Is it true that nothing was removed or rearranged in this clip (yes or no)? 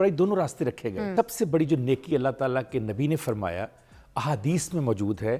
no